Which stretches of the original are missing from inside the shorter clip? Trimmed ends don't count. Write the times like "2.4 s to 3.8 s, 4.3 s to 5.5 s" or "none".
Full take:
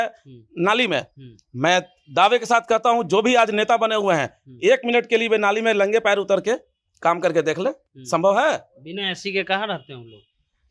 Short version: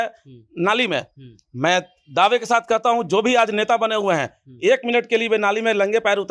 none

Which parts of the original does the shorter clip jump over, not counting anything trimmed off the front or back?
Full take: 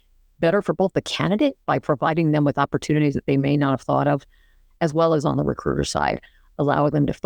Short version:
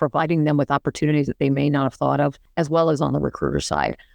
4.3 s to 4.7 s

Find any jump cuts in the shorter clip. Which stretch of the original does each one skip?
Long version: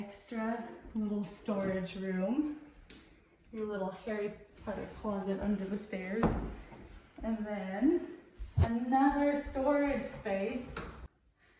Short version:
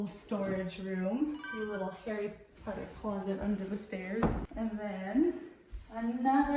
2.6 s to 3.5 s, 6.5 s to 7.1 s

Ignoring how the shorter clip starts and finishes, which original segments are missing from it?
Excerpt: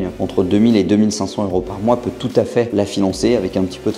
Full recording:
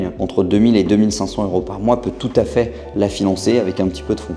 2.7 s to 2.9 s

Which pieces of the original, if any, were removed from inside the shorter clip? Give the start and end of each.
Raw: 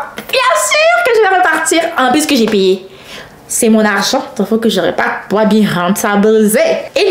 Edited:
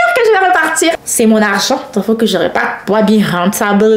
1.9 s to 3.4 s

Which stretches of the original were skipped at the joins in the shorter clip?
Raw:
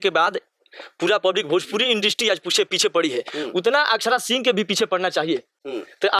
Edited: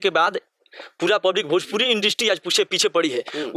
none

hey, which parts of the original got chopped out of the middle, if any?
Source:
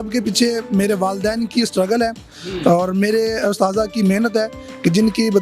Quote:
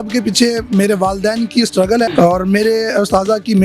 2.1 s to 2.6 s

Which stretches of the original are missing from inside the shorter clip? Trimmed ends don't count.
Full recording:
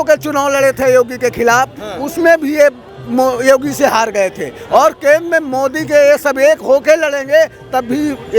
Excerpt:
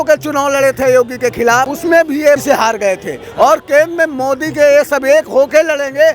1.7 s to 2.1 s, 2.8 s to 3.8 s

